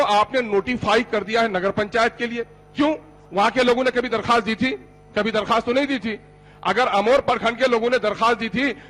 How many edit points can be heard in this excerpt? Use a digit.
0